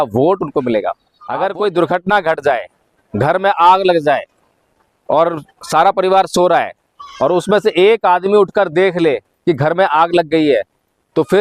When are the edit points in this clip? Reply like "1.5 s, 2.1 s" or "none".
1.1 s